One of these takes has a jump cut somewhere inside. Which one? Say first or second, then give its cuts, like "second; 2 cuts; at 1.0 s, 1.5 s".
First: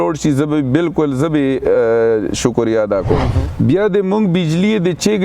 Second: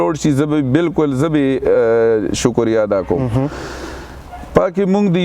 first; 1 cut; at 3.4 s